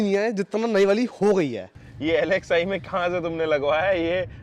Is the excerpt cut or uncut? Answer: cut